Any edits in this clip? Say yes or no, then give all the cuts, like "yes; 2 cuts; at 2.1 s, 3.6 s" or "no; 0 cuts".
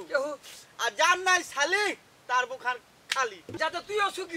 yes; 1 cut; at 3.4 s